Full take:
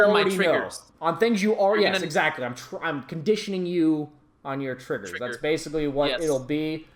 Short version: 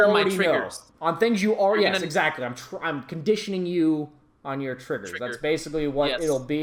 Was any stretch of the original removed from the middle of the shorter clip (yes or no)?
no